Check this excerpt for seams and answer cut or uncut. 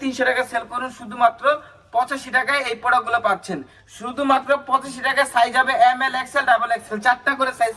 uncut